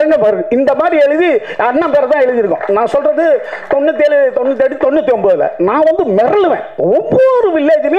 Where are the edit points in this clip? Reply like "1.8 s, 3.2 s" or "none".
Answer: none

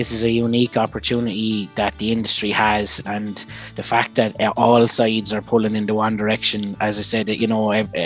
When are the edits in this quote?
none

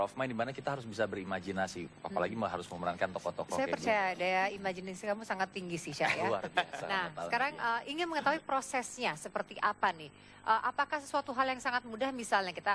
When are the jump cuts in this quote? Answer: none

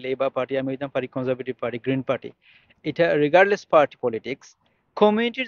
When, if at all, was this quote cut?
none

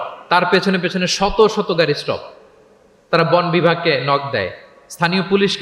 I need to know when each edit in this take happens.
none

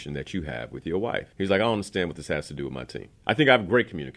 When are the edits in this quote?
1.3 s, 3.1 s

